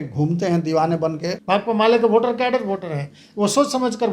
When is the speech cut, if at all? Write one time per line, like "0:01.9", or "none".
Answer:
0:01.3